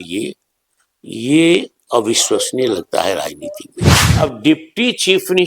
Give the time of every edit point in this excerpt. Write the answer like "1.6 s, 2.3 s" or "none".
4.0 s